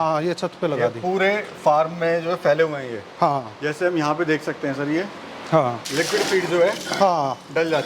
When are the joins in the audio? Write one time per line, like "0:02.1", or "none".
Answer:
0:05.9